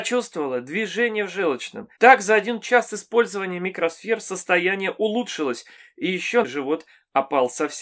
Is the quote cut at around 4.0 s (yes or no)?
no